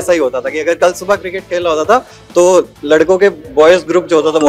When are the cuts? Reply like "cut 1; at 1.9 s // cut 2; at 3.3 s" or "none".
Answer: none